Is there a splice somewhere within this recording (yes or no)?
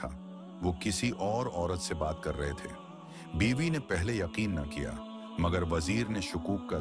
no